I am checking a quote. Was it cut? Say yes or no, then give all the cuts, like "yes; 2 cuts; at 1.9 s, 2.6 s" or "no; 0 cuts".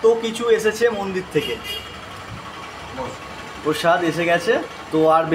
no; 0 cuts